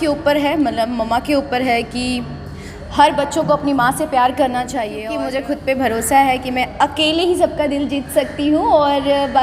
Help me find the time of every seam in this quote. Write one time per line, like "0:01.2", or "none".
0:05.0